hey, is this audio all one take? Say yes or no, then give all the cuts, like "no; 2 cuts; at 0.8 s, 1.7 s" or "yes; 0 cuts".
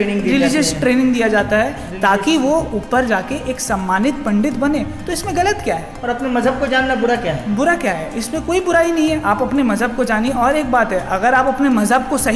yes; 0 cuts